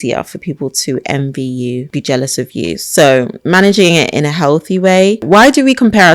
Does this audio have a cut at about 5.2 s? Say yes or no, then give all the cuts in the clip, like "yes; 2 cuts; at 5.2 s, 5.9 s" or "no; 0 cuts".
yes; 2 cuts; at 1.9 s, 5.2 s